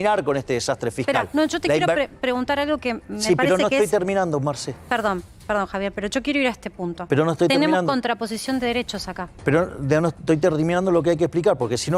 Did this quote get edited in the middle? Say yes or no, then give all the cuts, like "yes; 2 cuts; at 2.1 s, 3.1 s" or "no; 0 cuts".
no; 0 cuts